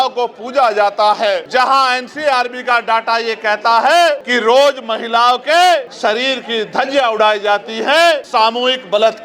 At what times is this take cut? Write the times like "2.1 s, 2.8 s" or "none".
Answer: 1.4 s, 4.3 s, 5.9 s, 8.2 s